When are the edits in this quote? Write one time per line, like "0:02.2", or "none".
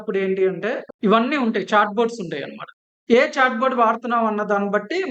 0:00.9